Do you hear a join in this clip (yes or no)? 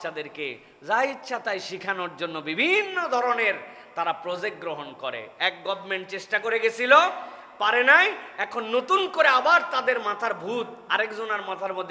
no